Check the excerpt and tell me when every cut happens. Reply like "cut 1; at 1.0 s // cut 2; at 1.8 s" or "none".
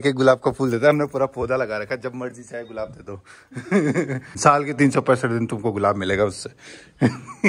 cut 1; at 4.3 s